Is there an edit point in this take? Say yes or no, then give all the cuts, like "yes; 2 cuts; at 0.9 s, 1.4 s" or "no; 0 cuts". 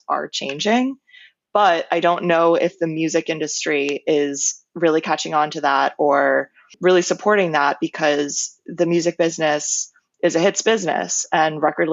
no; 0 cuts